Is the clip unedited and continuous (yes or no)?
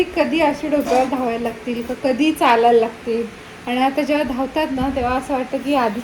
yes